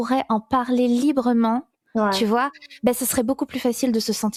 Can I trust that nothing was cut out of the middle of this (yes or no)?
yes